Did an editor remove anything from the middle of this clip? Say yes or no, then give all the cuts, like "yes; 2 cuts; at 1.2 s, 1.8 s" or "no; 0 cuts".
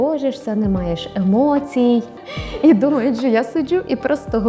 yes; 1 cut; at 2.1 s